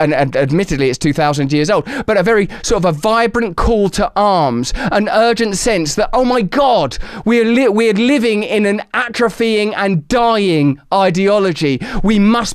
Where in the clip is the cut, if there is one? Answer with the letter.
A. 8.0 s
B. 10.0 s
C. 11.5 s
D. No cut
D